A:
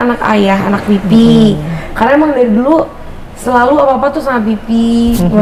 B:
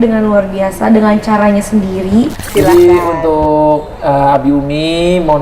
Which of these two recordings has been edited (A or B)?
B